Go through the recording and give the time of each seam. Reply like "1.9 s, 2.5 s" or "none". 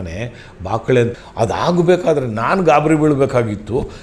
1.2 s